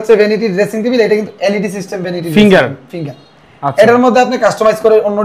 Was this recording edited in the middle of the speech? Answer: no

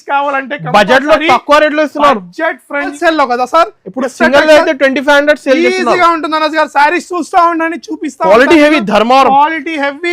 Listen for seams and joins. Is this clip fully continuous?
no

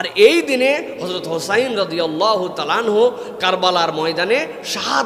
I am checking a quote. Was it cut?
no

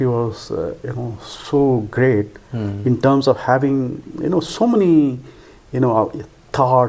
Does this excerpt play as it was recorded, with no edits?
yes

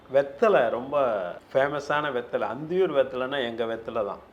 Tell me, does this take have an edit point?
yes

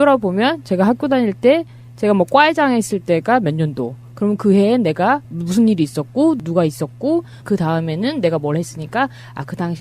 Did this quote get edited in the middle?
yes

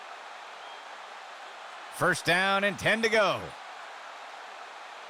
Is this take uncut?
no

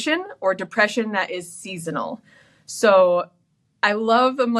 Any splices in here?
no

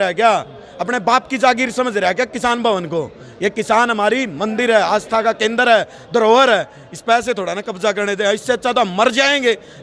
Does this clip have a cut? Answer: no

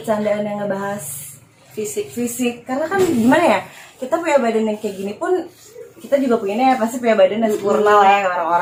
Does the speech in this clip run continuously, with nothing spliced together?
yes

